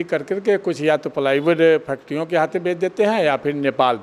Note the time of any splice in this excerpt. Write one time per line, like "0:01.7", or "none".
none